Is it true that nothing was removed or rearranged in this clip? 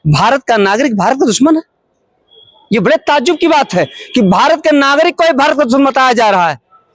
yes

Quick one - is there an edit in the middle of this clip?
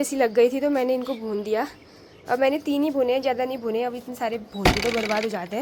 no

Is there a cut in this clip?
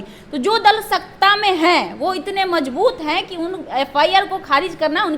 no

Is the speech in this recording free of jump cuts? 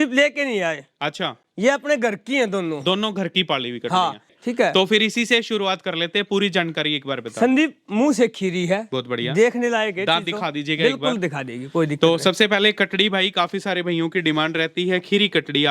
no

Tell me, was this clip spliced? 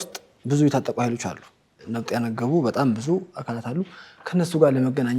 yes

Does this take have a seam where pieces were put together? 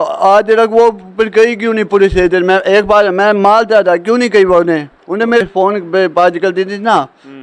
yes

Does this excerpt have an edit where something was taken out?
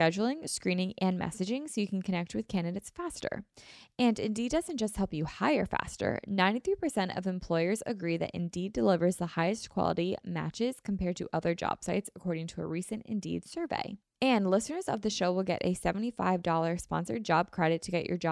yes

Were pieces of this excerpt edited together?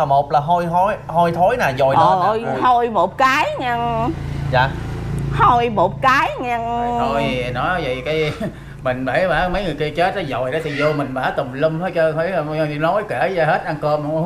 no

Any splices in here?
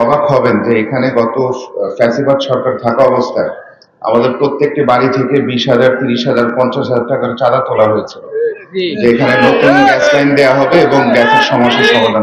no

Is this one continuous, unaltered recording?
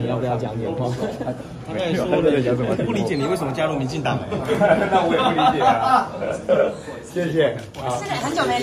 yes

